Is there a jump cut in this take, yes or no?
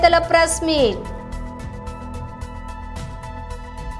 no